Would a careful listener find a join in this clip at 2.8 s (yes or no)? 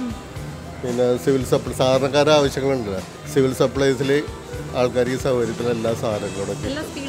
no